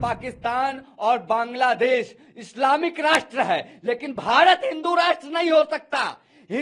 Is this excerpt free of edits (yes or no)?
yes